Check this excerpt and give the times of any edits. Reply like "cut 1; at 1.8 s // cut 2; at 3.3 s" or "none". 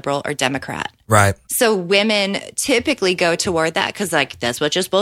none

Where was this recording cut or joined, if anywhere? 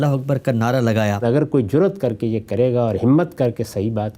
cut 1; at 1.2 s

